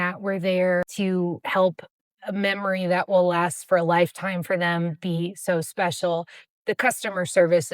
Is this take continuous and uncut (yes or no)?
no